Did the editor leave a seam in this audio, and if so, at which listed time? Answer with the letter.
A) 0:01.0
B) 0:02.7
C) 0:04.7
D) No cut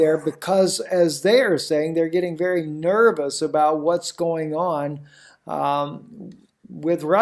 C